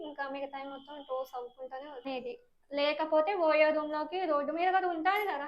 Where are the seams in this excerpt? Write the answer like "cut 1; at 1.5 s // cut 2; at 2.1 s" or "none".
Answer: cut 1; at 2.1 s